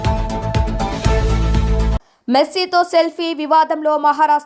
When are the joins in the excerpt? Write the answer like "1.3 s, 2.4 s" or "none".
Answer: 2.1 s